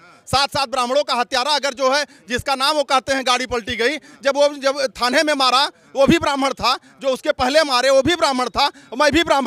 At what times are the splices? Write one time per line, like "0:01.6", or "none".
none